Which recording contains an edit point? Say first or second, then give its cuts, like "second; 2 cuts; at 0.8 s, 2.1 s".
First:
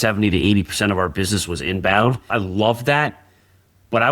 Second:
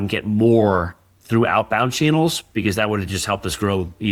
first; 1 cut; at 2.3 s